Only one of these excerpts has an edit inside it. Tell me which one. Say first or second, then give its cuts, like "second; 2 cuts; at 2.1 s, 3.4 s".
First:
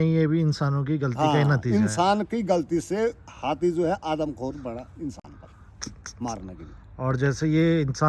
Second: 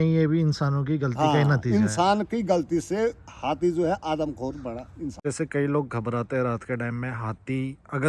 second; 1 cut; at 5.2 s